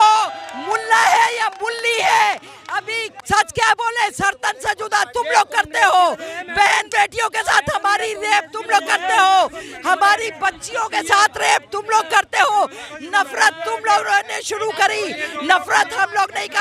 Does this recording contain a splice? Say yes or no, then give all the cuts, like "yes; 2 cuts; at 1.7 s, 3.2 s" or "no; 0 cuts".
no; 0 cuts